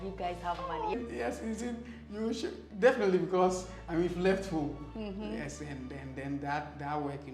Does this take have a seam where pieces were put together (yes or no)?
yes